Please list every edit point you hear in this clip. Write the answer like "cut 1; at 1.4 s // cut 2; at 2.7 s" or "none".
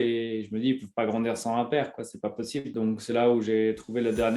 cut 1; at 2.7 s